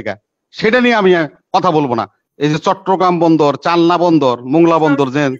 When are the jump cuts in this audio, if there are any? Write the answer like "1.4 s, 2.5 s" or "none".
2.2 s